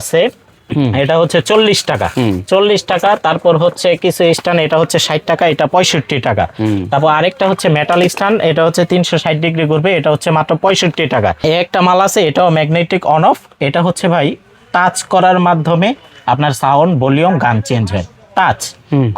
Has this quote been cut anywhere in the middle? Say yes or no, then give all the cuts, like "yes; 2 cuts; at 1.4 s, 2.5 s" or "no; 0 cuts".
yes; 1 cut; at 11.4 s